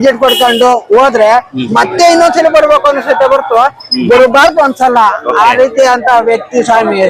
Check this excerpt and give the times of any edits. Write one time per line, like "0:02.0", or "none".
none